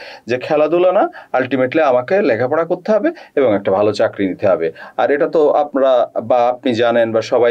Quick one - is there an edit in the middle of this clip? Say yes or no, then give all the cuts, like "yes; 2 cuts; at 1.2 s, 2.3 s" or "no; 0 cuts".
no; 0 cuts